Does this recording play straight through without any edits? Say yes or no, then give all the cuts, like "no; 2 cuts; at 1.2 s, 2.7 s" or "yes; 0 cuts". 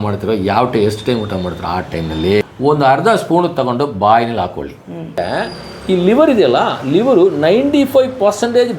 no; 2 cuts; at 2.5 s, 5.2 s